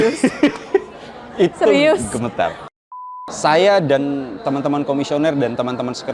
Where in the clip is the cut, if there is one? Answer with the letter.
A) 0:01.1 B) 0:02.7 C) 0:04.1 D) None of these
B